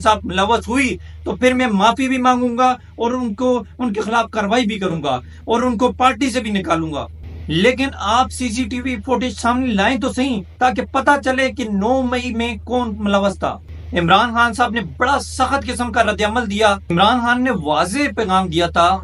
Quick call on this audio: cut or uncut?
uncut